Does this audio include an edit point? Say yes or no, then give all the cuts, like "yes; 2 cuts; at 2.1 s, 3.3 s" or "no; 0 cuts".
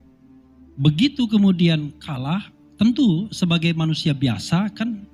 no; 0 cuts